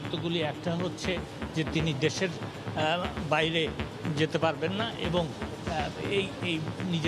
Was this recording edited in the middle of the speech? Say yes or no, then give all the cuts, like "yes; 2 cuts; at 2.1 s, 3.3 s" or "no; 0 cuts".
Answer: no; 0 cuts